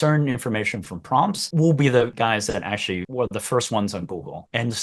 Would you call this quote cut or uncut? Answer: cut